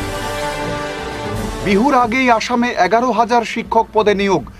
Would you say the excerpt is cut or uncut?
cut